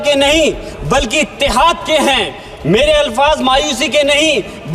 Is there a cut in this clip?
no; 0 cuts

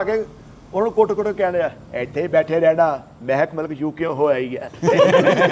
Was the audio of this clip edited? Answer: no; 0 cuts

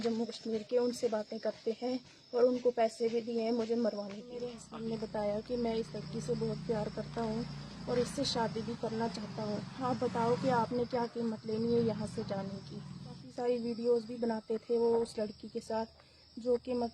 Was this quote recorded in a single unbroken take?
no; 2 cuts; at 4.6 s, 13.3 s

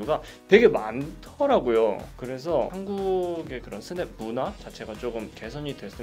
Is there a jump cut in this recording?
yes; 1 cut; at 2.7 s

